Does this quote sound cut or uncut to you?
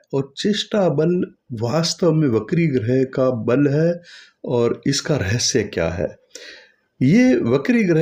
uncut